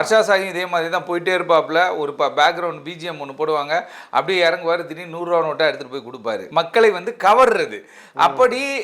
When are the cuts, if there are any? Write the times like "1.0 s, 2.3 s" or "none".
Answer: 6.4 s